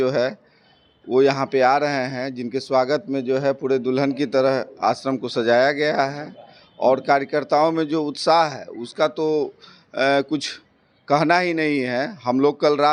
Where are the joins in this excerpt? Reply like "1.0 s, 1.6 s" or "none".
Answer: none